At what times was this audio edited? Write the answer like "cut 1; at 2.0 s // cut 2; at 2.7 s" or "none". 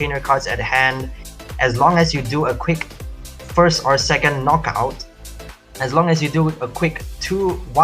cut 1; at 1.5 s